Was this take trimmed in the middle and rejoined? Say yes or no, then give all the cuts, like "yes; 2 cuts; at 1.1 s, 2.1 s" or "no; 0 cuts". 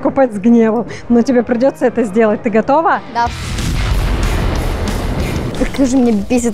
yes; 1 cut; at 5.5 s